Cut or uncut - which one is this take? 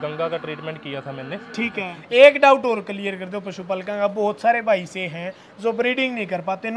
cut